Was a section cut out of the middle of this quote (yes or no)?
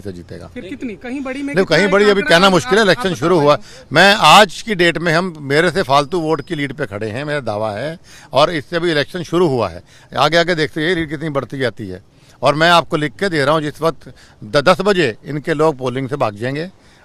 no